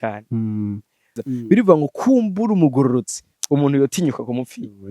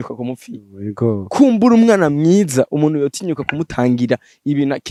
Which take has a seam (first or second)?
first